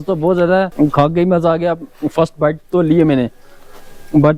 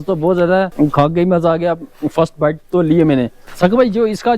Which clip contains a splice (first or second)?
second